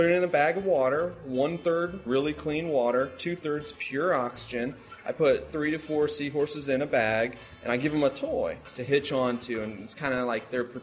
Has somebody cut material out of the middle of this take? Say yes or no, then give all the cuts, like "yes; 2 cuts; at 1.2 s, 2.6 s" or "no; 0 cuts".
yes; 3 cuts; at 2.0 s, 5.5 s, 8.6 s